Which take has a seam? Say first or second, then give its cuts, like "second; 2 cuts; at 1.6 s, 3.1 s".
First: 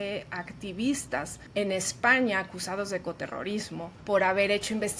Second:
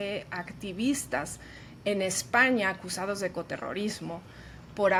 first; 2 cuts; at 1.4 s, 3.9 s